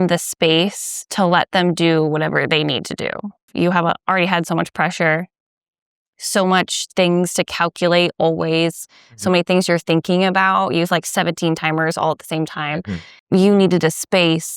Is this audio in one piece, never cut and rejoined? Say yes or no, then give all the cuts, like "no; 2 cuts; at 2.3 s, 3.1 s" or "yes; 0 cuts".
no; 2 cuts; at 3.5 s, 13.1 s